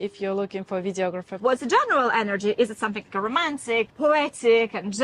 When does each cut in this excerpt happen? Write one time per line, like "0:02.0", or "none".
0:01.3